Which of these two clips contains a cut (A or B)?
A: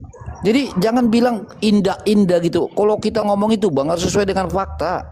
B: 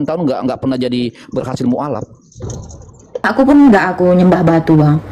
B